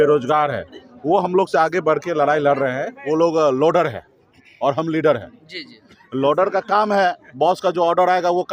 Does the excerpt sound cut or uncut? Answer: cut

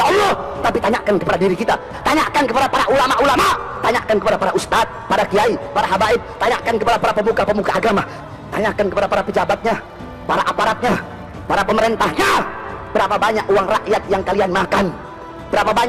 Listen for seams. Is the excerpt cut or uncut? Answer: cut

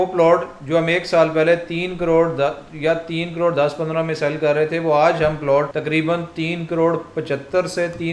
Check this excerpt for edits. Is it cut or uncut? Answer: cut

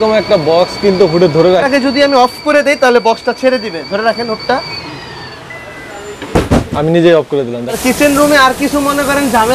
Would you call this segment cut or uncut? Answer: cut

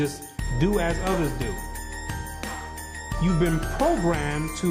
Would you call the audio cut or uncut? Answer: uncut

